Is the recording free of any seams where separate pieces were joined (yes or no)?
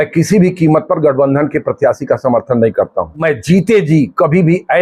no